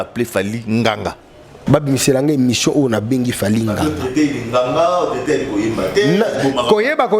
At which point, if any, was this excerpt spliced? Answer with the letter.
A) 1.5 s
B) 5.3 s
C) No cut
A